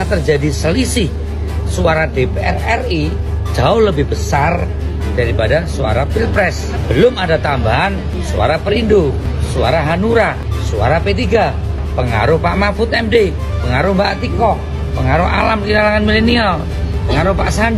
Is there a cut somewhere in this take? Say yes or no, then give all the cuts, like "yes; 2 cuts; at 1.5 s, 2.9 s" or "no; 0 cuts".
no; 0 cuts